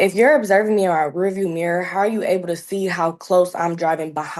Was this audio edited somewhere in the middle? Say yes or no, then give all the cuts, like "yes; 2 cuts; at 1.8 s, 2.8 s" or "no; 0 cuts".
no; 0 cuts